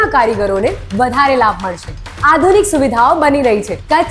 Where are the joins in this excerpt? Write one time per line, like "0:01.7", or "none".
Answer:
0:02.0

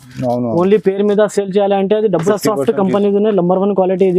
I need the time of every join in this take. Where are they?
0:02.3

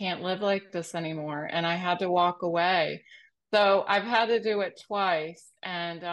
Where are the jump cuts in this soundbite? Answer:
none

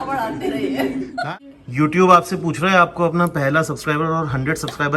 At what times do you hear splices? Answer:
0:01.4

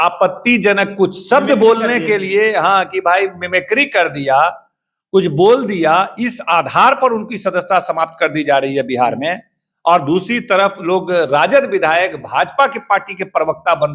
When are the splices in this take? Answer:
none

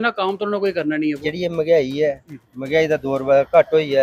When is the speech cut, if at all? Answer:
0:01.2

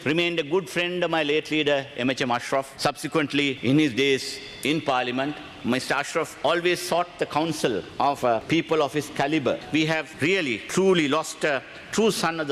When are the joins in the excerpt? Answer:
0:03.6
0:05.5
0:08.2
0:10.1

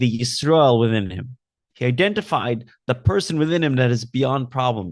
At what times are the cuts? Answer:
none

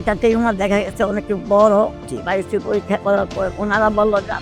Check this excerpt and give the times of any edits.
0:02.0
0:03.5

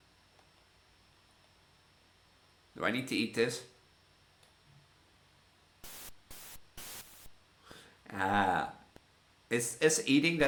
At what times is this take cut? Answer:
none

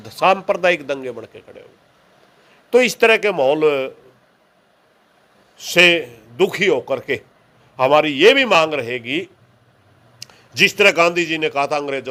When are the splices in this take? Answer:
none

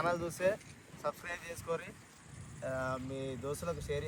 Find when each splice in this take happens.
none

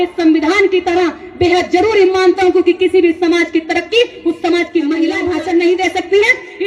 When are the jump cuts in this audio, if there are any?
0:05.2

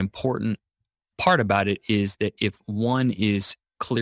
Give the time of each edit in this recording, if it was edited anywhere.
0:01.1

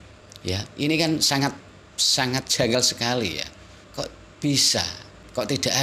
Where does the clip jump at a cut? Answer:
none

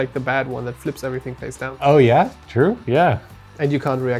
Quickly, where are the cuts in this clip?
none

